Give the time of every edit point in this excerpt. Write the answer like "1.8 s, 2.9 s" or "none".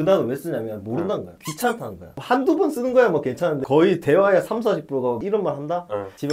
2.1 s, 5.2 s